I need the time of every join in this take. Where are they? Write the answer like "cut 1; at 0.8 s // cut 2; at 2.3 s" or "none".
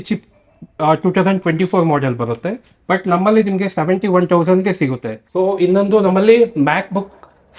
cut 1; at 5.2 s